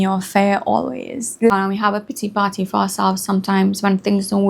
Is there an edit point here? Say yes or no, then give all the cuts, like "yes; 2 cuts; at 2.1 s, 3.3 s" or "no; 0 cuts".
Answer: yes; 1 cut; at 1.5 s